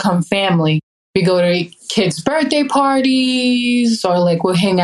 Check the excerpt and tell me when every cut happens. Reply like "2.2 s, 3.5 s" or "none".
0.9 s